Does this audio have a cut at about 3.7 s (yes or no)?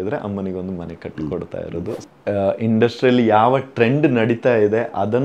no